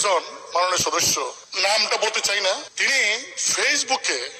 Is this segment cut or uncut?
cut